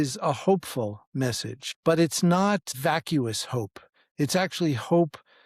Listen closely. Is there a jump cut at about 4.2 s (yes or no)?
no